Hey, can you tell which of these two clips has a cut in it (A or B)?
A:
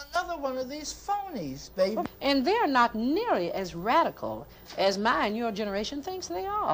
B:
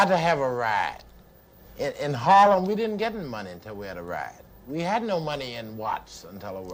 A